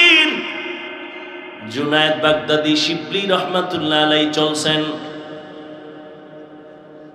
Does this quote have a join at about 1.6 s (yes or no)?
yes